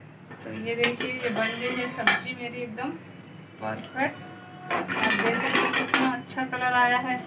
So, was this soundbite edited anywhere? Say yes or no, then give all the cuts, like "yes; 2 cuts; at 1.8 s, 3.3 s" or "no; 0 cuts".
no; 0 cuts